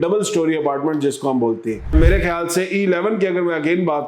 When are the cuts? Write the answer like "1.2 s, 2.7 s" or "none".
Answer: 1.9 s